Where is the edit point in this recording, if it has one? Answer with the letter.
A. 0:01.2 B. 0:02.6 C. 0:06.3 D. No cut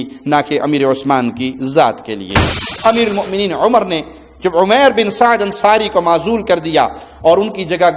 B